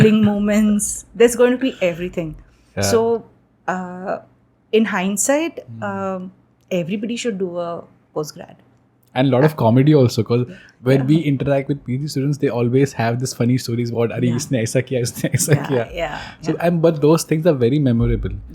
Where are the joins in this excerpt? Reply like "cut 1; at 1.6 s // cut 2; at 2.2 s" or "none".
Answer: none